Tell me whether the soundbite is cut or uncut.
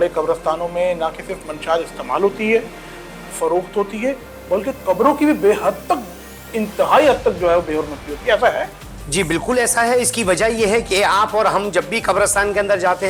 uncut